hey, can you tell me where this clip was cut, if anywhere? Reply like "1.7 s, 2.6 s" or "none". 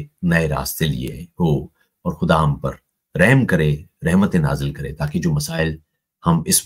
none